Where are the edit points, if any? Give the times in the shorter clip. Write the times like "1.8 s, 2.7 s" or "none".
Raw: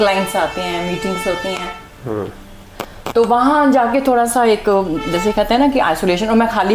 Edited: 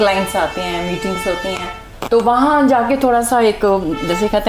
1.9 s